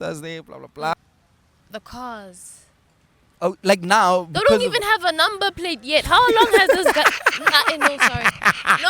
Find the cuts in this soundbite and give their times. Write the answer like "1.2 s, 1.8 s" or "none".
0.9 s